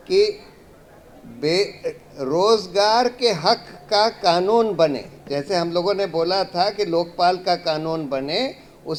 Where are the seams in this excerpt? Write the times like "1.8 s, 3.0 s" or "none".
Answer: none